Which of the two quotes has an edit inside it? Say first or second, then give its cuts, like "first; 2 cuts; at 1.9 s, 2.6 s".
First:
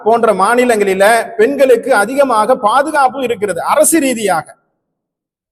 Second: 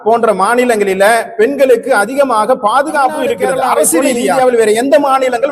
second; 1 cut; at 4.4 s